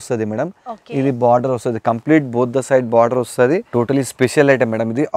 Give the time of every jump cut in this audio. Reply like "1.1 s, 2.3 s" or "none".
3.7 s